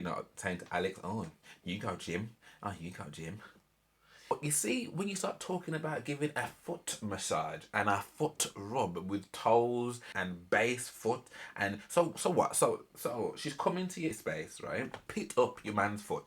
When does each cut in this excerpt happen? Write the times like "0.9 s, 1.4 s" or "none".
4.3 s, 10.1 s, 14.5 s